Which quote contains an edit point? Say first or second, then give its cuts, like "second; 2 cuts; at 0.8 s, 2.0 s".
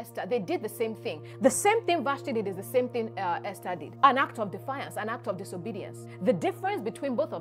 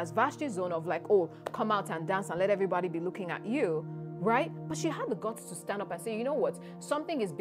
first; 3 cuts; at 1.3 s, 3.9 s, 6.0 s